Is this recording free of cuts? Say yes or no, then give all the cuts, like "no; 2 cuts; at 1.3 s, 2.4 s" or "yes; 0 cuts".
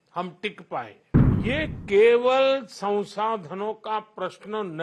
no; 1 cut; at 1.4 s